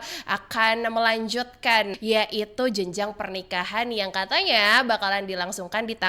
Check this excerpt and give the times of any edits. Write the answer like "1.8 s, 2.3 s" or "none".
1.9 s